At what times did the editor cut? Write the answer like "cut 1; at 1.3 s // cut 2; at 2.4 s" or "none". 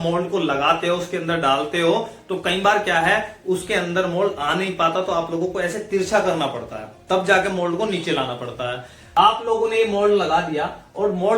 cut 1; at 8.9 s